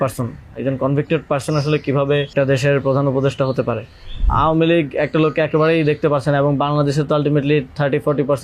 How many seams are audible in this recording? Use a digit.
2